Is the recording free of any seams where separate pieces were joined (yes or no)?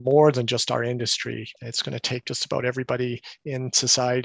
no